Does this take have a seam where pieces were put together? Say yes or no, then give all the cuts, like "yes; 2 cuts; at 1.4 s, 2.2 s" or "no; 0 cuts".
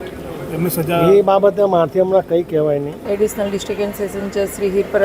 yes; 1 cut; at 2.9 s